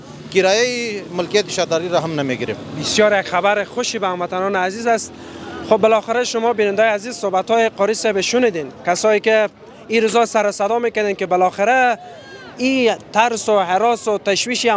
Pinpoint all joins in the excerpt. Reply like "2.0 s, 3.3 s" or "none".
none